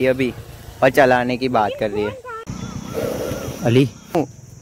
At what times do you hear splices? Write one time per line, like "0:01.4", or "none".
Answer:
0:02.4

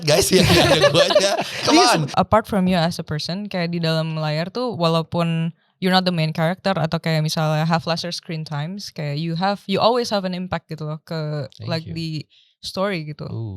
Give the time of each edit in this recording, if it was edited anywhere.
0:02.1

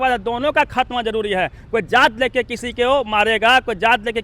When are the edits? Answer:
none

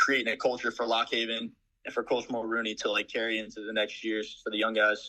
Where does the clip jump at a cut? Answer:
none

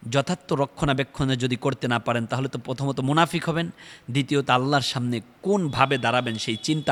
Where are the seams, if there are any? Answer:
none

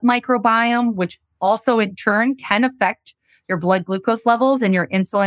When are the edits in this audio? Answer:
none

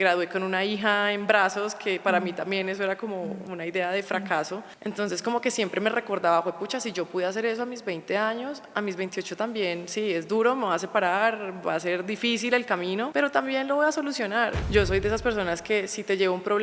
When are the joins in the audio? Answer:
0:04.7
0:13.1
0:14.6

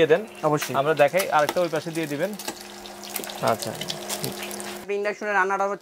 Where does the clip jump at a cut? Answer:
0:04.8

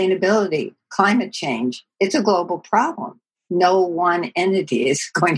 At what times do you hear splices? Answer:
none

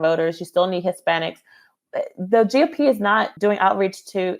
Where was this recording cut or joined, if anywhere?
0:03.3

